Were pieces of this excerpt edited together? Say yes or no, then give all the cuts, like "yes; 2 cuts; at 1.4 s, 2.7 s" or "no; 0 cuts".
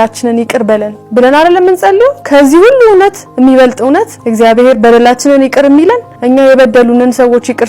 yes; 4 cuts; at 1.0 s, 2.2 s, 4.2 s, 6.1 s